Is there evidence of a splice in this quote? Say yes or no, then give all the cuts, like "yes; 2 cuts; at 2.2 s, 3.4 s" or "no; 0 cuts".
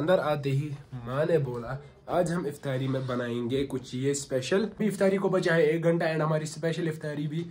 yes; 1 cut; at 4.8 s